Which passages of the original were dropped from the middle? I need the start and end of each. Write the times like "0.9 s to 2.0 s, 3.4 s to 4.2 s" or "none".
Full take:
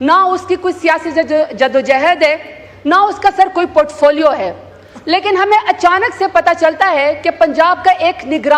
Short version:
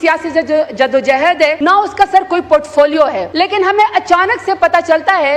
2.4 s to 2.8 s, 4.5 s to 5.0 s